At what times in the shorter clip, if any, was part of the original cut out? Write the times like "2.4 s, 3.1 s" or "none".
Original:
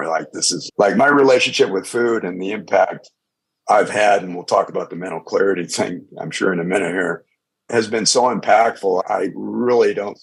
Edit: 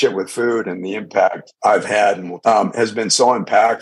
1.5 s, 2.3 s